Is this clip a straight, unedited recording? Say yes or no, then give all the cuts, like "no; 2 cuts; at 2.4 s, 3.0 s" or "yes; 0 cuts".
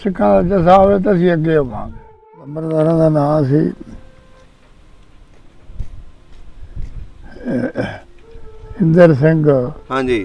no; 1 cut; at 2.6 s